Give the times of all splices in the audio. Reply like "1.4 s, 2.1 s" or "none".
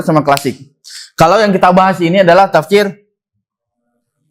none

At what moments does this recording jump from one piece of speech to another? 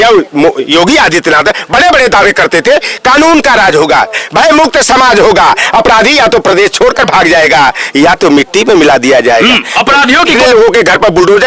10.3 s

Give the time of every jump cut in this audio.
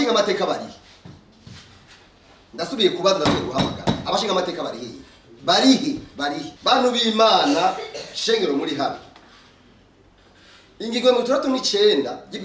none

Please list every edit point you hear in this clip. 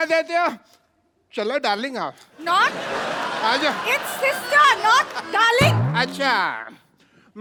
none

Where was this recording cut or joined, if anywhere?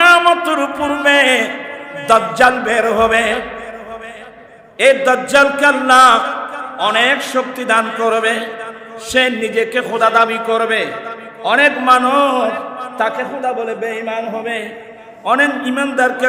4.4 s

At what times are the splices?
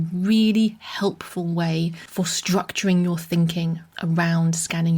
2.0 s

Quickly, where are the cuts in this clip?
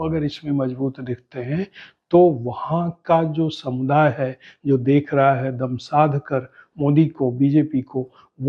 none

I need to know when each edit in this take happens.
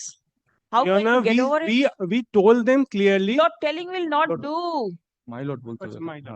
none

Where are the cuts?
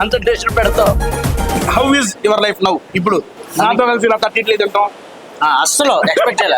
1.4 s, 3.4 s

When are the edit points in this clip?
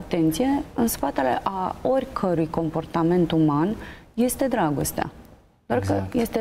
none

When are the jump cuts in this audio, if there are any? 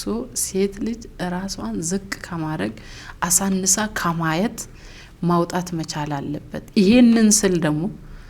none

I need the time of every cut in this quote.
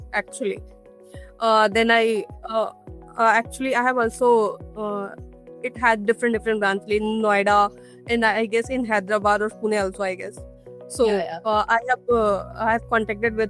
none

